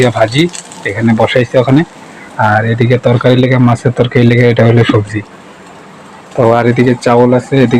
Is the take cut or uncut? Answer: uncut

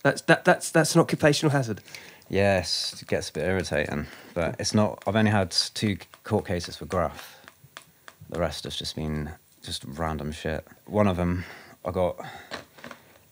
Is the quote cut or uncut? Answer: cut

